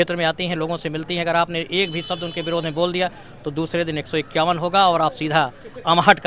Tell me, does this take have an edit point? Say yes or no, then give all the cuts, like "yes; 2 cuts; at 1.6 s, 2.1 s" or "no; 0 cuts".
no; 0 cuts